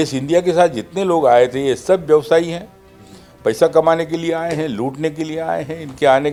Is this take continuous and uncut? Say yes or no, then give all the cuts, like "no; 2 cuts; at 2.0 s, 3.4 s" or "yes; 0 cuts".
yes; 0 cuts